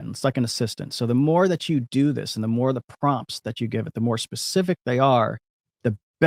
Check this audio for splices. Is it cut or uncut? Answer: uncut